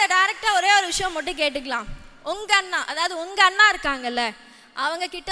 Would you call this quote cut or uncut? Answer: uncut